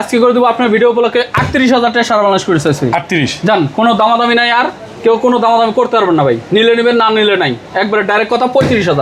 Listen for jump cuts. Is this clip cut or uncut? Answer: uncut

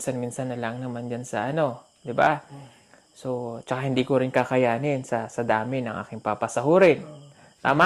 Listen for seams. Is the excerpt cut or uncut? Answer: uncut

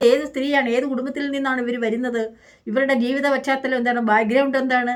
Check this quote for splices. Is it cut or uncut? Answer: uncut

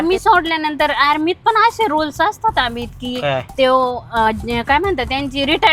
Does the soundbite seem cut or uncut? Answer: uncut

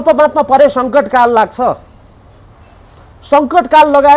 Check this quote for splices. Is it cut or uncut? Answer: uncut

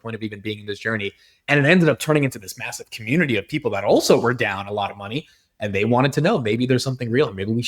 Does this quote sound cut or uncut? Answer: uncut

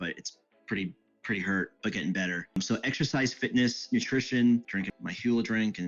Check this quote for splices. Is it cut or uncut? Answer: cut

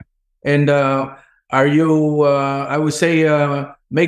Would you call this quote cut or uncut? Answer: uncut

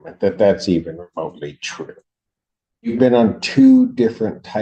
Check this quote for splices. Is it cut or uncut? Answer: uncut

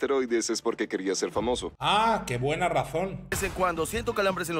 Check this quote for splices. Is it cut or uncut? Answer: cut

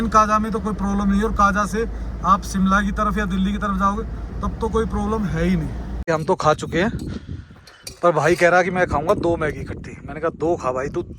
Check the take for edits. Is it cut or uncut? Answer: cut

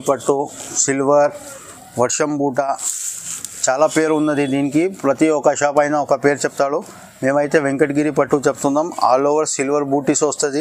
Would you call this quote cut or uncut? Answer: uncut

